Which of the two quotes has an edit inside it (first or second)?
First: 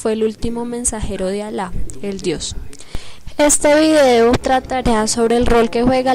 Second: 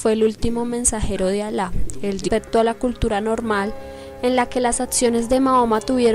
first